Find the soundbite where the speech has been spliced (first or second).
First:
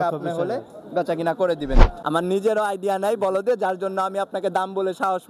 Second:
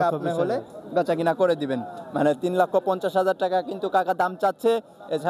first